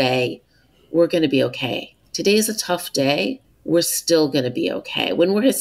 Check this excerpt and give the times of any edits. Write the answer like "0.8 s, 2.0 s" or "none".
3.5 s